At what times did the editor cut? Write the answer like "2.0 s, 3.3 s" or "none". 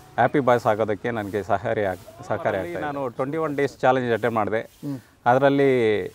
2.8 s